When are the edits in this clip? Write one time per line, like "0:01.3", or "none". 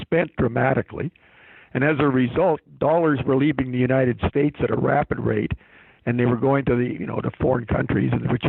none